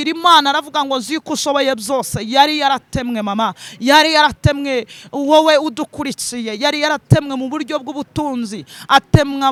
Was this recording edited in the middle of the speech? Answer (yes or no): no